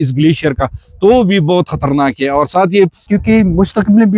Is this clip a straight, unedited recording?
no; 1 cut; at 3.0 s

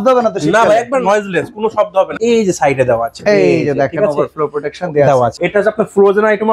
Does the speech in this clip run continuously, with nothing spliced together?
no; 3 cuts; at 1.0 s, 2.1 s, 5.4 s

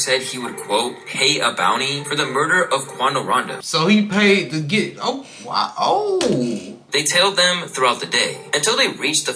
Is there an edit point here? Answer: yes; 2 cuts; at 3.6 s, 6.9 s

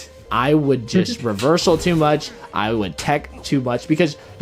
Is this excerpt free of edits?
yes; 0 cuts

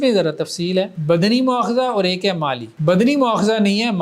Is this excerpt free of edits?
no; 2 cuts; at 1.0 s, 2.7 s

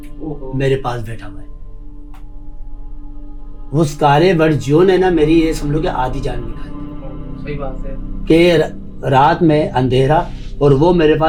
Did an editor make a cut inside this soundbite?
no; 0 cuts

